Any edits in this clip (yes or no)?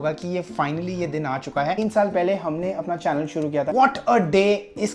yes